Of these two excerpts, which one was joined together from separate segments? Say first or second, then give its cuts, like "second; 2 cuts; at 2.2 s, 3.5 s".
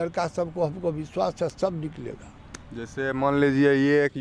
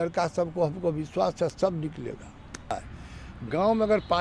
second; 1 cut; at 2.8 s